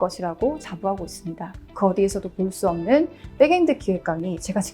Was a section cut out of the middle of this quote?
yes; 1 cut; at 1.6 s

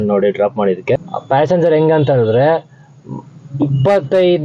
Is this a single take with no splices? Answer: no; 1 cut; at 1.1 s

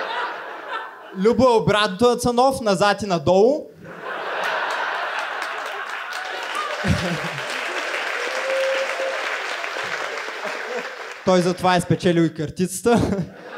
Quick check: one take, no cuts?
yes; 0 cuts

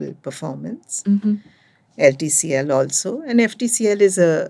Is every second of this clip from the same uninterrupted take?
yes; 0 cuts

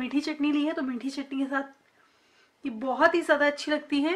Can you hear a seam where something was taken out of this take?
no; 0 cuts

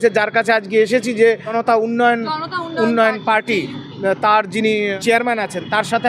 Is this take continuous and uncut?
no; 2 cuts; at 1.6 s, 5.0 s

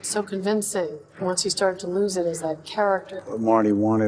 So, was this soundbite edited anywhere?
yes; 2 cuts; at 1.0 s, 3.1 s

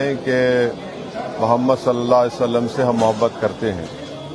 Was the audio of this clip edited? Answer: yes; 1 cut; at 1.8 s

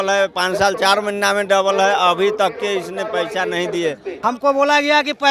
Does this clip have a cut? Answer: yes; 1 cut; at 4.1 s

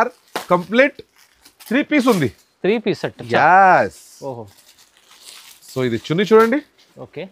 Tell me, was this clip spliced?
no; 0 cuts

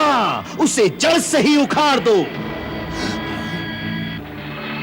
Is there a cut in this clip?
no; 0 cuts

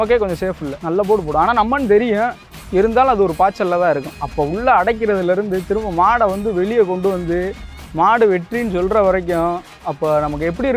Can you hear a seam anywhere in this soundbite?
yes; 1 cut; at 4.2 s

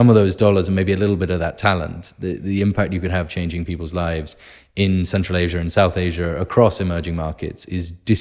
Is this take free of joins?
yes; 0 cuts

